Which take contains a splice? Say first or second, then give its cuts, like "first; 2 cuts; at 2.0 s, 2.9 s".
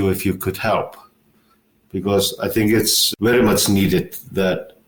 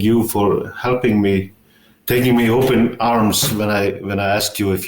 second; 1 cut; at 2.0 s